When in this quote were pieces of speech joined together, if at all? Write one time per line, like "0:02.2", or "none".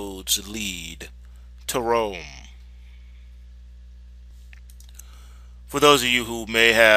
none